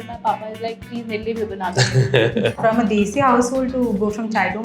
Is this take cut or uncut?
cut